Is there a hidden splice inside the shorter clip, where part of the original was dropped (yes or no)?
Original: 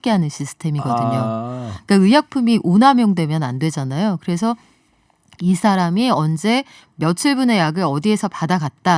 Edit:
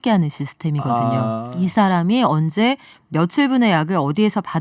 yes